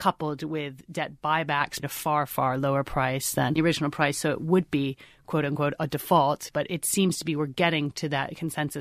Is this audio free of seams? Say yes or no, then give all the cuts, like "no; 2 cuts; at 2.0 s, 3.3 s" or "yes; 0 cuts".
no; 2 cuts; at 1.8 s, 6.5 s